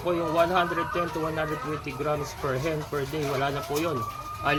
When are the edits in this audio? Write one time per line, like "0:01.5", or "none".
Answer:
none